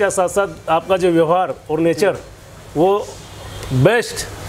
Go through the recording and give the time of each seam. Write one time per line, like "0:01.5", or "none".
none

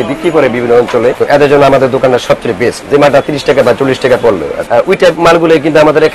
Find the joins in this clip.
0:01.2
0:02.8
0:04.5

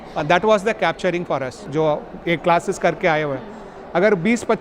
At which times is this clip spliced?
0:01.6

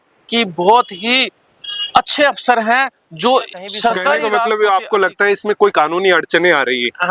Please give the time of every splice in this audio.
0:04.3

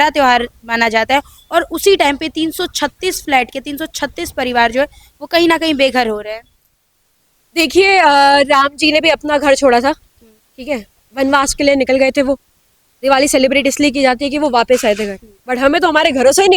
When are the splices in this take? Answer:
none

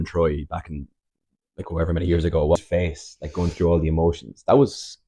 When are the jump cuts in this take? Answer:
0:02.6

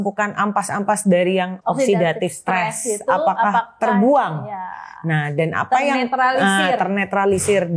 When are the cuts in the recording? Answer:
0:01.5

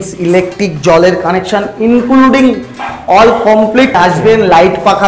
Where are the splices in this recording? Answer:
0:03.9

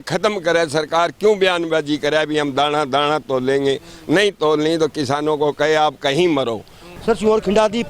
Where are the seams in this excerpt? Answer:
0:07.0

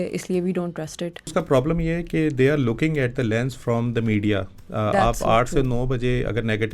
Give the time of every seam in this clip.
0:01.3

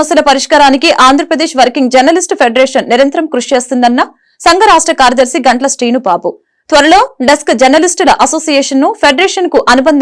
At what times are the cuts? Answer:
none

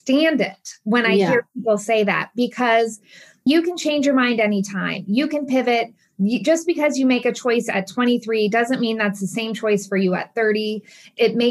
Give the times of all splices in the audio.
none

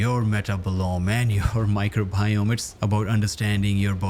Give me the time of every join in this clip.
none

